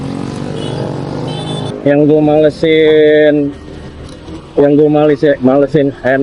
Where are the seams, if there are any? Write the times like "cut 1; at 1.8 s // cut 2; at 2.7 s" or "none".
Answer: cut 1; at 1.7 s